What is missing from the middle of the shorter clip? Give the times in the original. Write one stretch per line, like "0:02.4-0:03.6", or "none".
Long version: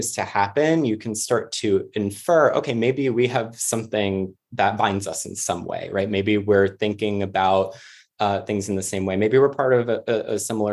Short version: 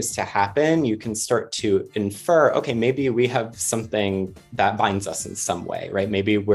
none